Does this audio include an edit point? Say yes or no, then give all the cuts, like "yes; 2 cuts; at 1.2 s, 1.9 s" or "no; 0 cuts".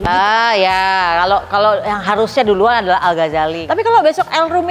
yes; 1 cut; at 3.6 s